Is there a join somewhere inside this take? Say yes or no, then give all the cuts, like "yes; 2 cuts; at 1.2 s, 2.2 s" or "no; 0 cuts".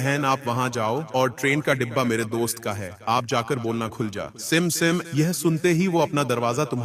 no; 0 cuts